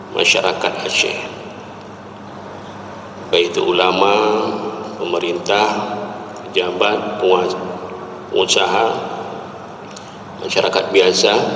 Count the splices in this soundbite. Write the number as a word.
zero